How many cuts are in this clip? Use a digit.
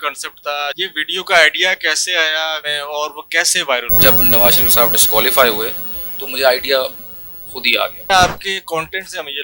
4